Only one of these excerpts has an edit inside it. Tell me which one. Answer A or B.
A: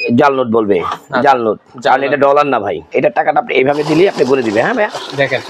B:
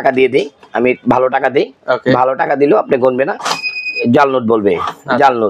A